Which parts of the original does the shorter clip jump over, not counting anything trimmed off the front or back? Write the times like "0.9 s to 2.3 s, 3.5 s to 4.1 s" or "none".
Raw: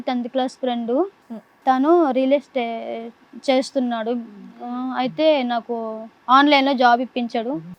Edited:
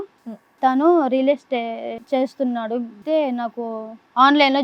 3.0 s to 3.3 s, 4.4 s to 5.1 s